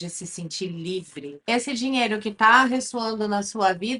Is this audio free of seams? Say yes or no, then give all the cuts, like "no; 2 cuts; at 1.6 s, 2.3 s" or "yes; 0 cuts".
no; 1 cut; at 1.4 s